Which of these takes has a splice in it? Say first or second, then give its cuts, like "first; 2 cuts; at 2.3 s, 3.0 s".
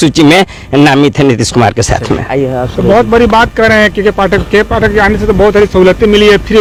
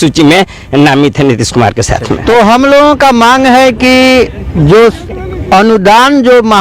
second; 1 cut; at 2.2 s